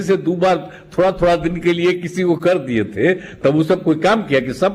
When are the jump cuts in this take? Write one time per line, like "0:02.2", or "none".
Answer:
none